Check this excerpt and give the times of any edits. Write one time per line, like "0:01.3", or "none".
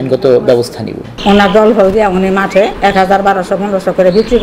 0:01.2